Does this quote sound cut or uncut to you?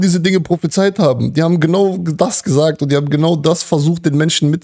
uncut